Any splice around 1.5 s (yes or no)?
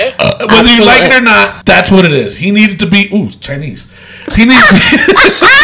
yes